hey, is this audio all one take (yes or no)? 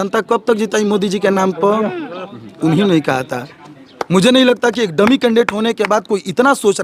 yes